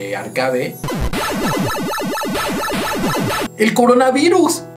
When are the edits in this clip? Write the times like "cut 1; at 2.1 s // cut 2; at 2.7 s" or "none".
cut 1; at 3.4 s

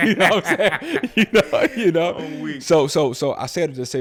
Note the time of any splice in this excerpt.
none

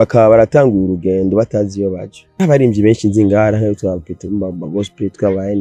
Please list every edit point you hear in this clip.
cut 1; at 2.3 s

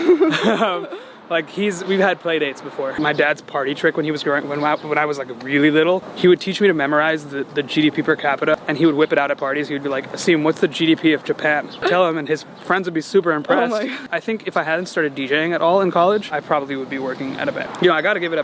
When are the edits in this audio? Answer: cut 1; at 3.0 s // cut 2; at 8.5 s // cut 3; at 11.8 s // cut 4; at 14.0 s // cut 5; at 17.6 s

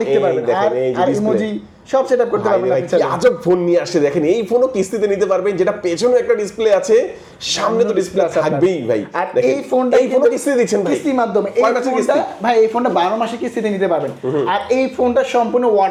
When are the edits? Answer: none

